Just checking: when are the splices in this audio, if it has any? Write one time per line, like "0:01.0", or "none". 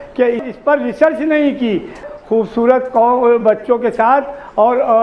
0:02.0